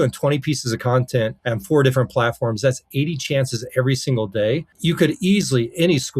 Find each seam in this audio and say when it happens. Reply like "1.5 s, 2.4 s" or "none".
1.4 s, 4.7 s